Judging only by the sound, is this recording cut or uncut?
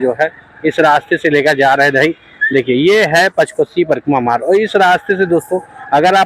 uncut